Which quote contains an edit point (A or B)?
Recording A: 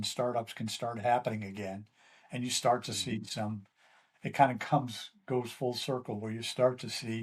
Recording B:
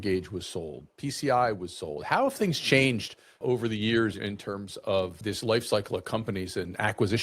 B